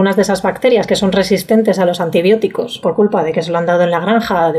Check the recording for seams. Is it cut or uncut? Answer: cut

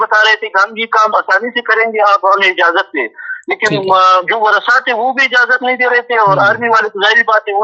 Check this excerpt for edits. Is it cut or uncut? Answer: uncut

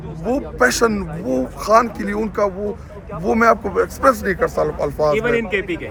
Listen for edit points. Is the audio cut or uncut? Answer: uncut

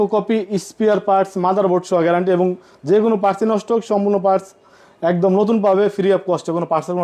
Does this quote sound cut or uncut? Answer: uncut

